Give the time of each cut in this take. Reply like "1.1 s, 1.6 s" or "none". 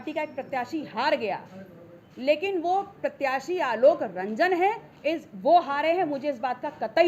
none

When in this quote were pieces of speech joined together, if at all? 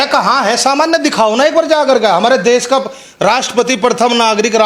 none

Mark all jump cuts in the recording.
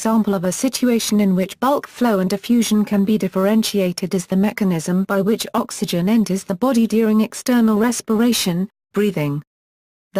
1.5 s

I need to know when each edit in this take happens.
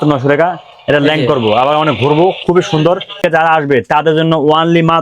3.2 s

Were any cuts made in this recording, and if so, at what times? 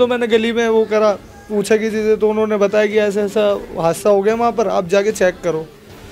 none

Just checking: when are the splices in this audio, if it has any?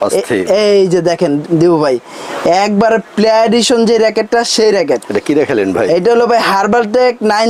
none

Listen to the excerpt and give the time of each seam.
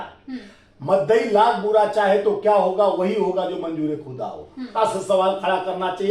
4.7 s

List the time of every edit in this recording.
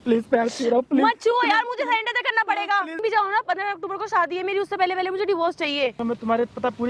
3.0 s, 6.0 s

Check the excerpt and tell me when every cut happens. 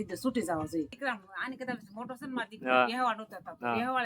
0.9 s

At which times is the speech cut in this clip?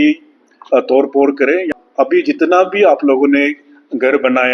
1.7 s

